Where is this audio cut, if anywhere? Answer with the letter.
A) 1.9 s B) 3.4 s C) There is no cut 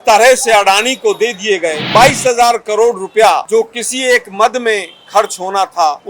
A